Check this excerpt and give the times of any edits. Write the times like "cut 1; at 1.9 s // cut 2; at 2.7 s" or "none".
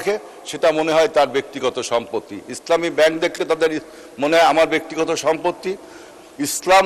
none